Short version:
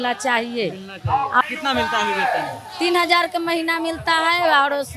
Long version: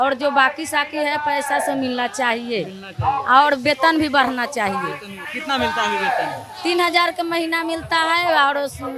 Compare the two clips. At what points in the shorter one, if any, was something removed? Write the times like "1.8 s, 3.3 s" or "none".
1.4 s